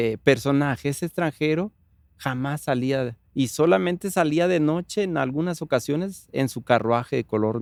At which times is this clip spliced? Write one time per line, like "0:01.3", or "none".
none